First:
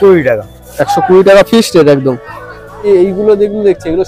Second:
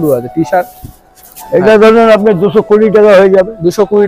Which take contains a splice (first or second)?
first